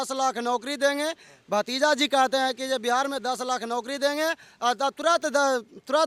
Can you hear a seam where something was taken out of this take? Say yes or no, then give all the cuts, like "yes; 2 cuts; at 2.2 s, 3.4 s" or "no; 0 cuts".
no; 0 cuts